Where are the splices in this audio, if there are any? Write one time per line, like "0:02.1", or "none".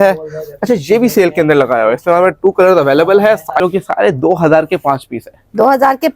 0:03.5